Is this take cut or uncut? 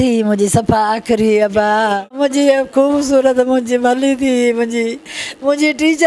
cut